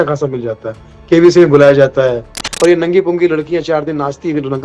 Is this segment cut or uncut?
cut